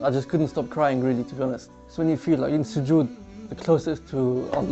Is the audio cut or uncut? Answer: cut